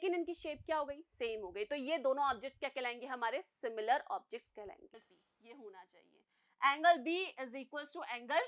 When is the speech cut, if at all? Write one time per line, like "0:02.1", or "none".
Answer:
0:05.1